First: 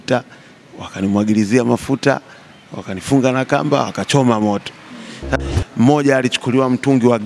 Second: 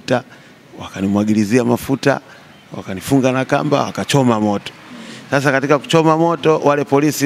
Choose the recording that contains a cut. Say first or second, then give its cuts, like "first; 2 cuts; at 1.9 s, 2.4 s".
first; 1 cut; at 5.3 s